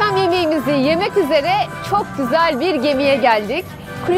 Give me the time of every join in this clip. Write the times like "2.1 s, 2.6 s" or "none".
none